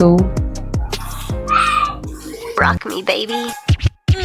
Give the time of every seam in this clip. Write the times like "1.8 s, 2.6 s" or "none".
2.5 s